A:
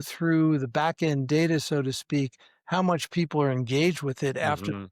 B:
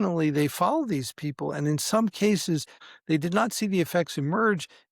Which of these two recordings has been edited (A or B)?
B